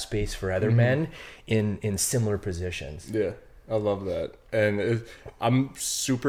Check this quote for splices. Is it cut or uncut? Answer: uncut